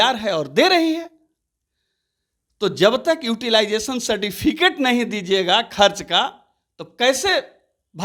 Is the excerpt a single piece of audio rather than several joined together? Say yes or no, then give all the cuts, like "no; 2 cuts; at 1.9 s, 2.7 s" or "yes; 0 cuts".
yes; 0 cuts